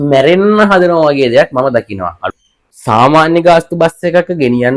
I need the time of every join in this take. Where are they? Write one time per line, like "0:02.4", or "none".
0:02.3